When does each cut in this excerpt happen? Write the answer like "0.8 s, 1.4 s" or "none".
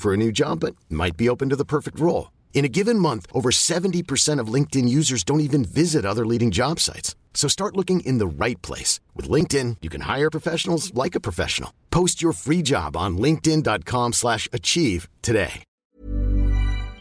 15.7 s